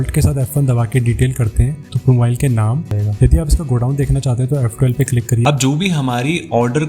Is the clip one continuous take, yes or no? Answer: no